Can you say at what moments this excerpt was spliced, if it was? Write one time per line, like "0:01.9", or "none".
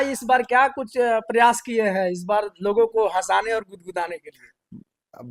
none